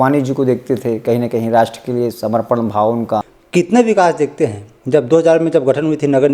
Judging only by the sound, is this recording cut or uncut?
cut